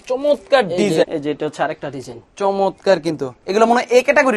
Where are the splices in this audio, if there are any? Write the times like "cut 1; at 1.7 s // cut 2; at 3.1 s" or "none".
cut 1; at 1.1 s